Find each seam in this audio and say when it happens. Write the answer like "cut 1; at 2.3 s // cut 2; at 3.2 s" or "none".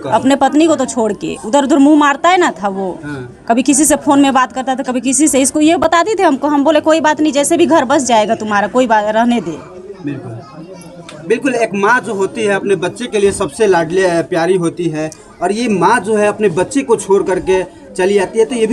none